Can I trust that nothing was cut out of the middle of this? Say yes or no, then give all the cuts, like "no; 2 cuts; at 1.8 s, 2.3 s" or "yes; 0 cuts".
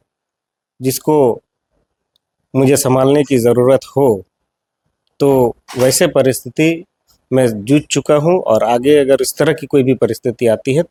yes; 0 cuts